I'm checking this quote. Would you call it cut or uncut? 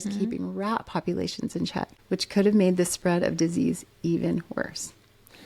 uncut